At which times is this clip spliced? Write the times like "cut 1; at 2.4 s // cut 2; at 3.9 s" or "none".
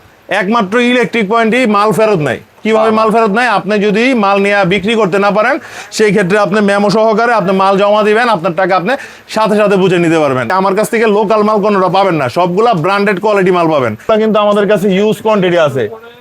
cut 1; at 10.5 s // cut 2; at 14.1 s